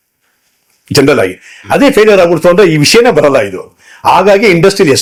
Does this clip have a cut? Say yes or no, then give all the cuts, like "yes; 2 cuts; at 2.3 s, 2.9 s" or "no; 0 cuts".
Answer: no; 0 cuts